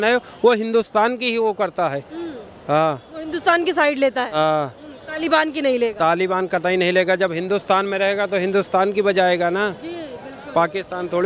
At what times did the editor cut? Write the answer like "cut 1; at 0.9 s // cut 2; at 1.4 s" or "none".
none